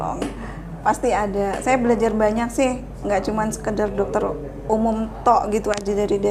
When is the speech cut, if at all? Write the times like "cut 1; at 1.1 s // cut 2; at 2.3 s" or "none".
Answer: none